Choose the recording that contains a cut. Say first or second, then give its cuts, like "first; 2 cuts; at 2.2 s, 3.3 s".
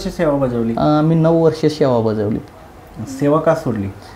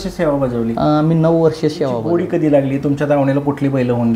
second; 1 cut; at 1.6 s